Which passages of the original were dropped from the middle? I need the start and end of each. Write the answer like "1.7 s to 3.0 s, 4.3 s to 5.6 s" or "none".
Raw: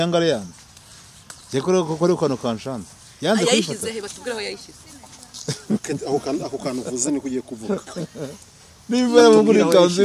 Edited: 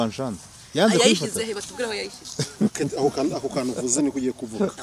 4.7 s to 5.3 s